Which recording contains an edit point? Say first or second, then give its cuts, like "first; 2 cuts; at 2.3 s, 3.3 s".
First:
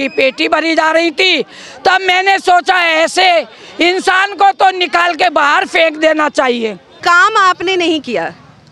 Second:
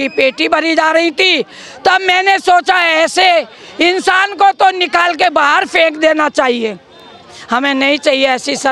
first; 1 cut; at 6.9 s